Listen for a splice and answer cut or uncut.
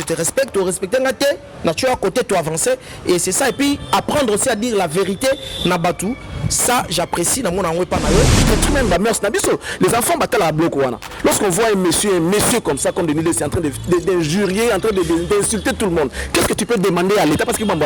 cut